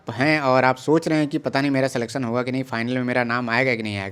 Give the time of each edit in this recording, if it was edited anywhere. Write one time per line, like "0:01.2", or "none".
none